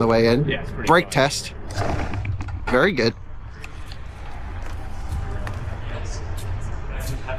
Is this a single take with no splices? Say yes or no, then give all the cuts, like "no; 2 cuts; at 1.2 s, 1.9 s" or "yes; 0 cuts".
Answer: yes; 0 cuts